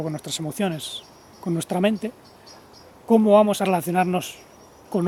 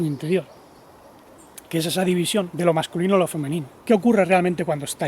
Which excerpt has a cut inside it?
second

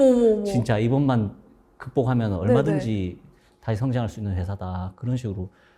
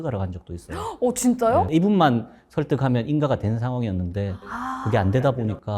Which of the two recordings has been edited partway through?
second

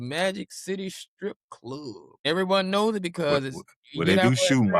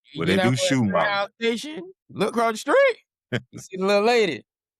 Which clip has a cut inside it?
first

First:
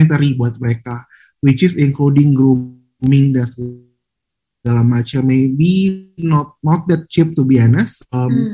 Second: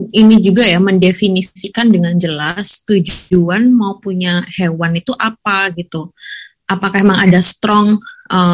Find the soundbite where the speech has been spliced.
second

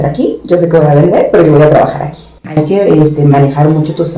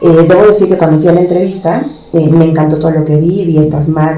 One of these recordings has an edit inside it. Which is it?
first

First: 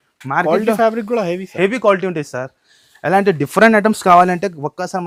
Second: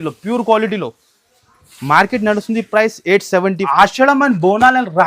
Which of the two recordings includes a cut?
second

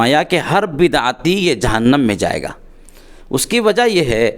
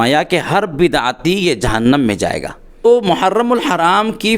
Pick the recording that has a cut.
second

